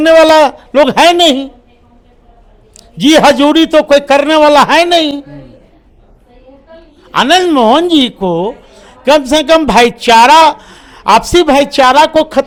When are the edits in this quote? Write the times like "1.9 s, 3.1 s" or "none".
none